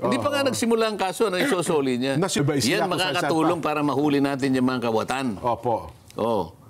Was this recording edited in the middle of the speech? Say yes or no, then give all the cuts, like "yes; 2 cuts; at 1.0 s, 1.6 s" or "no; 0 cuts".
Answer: yes; 1 cut; at 2.4 s